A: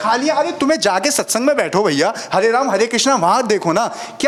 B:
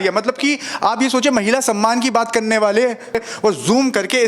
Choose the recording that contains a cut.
B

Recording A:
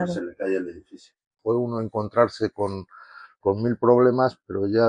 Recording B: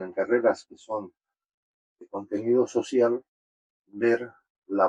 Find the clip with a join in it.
A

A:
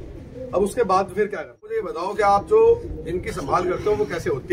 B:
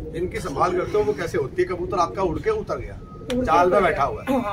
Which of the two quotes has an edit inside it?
A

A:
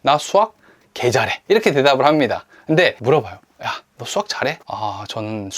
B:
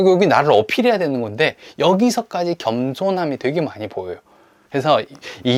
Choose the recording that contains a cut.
A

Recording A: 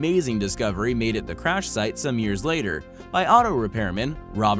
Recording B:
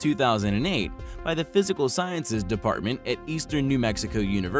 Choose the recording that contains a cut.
A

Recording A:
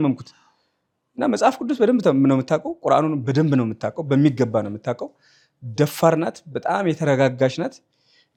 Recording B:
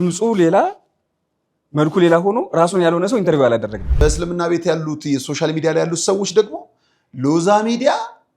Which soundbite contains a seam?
B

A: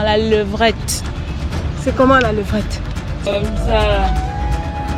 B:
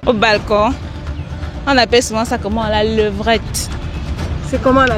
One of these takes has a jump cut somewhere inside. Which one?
A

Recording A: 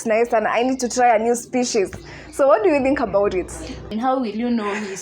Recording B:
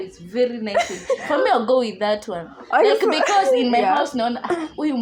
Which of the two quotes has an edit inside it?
A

